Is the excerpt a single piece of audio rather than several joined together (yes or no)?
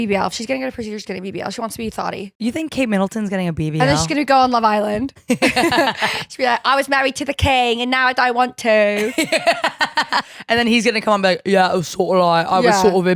no